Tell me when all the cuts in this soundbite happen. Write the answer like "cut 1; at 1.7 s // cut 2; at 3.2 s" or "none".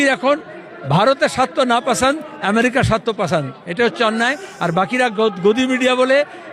none